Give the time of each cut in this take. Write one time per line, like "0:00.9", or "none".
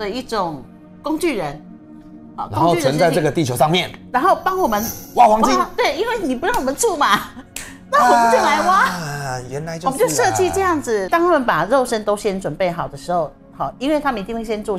0:11.1